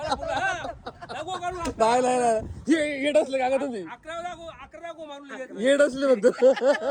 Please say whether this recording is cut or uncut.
uncut